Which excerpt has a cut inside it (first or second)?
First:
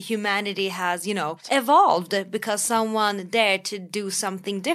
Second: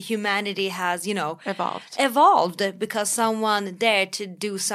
first